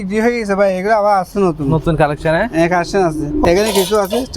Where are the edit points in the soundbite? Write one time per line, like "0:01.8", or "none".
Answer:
0:03.4